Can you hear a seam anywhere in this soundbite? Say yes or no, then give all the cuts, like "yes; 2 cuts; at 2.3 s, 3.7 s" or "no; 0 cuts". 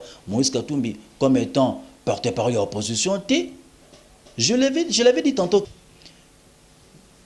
yes; 1 cut; at 5.7 s